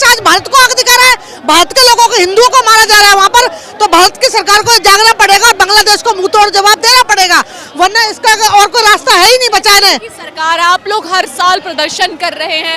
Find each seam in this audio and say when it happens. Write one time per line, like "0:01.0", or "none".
none